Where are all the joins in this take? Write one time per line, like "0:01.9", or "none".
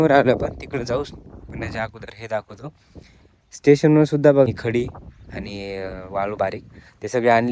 0:04.5